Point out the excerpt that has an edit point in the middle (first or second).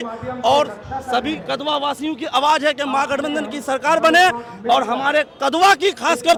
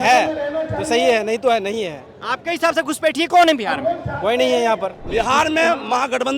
second